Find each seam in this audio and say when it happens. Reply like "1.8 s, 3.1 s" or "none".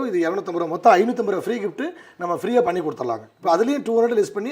3.2 s